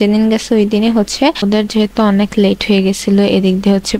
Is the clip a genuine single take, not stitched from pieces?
no; 1 cut; at 1.4 s

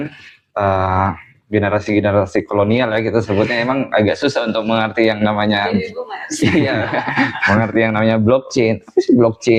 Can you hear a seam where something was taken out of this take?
no; 0 cuts

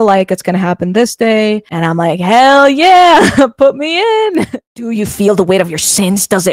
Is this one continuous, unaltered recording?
no; 1 cut; at 4.6 s

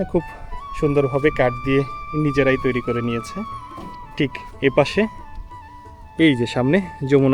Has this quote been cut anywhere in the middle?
no; 0 cuts

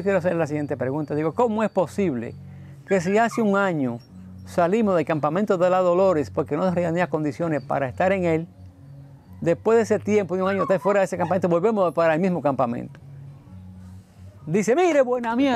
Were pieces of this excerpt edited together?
no; 0 cuts

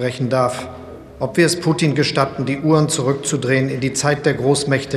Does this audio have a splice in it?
no; 0 cuts

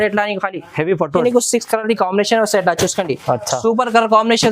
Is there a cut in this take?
yes; 1 cut; at 1.2 s

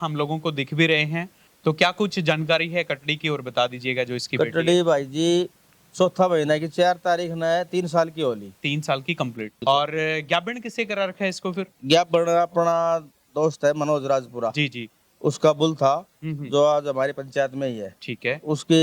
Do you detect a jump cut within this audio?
yes; 1 cut; at 9.6 s

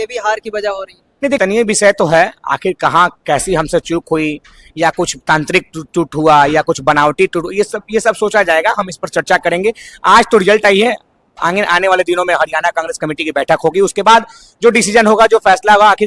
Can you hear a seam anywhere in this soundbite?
yes; 1 cut; at 1.4 s

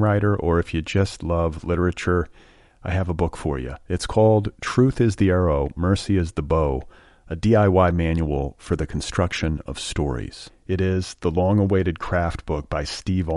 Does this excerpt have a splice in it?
no; 0 cuts

